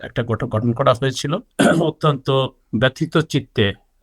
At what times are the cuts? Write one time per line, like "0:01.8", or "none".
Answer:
0:01.4